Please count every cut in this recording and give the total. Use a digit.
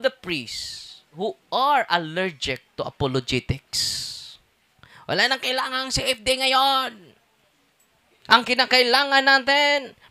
1